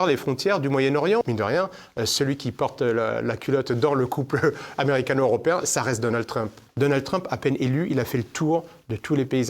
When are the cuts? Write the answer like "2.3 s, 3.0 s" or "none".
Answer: 1.2 s, 6.6 s